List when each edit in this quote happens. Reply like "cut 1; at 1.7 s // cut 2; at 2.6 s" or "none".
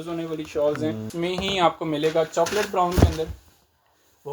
cut 1; at 1.1 s

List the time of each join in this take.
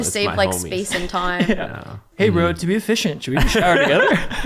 cut 1; at 2.1 s

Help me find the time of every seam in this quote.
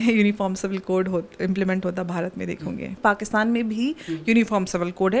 cut 1; at 3.0 s

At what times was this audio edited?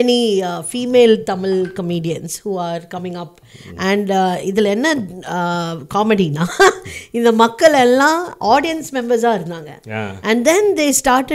none

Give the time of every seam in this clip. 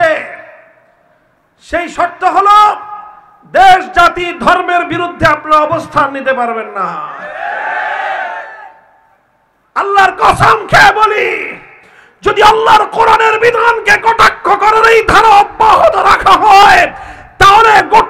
none

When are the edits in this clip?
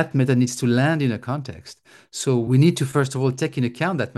cut 1; at 2.5 s

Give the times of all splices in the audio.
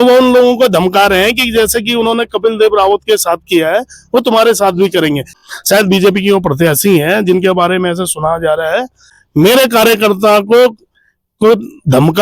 cut 1; at 5.4 s // cut 2; at 9.2 s

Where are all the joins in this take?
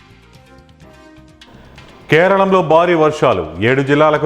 none

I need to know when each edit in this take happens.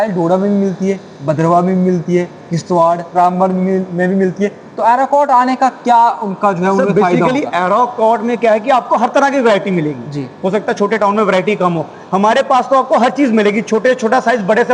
none

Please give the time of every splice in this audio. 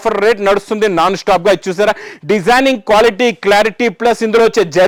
none

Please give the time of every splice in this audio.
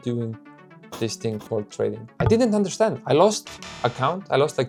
none

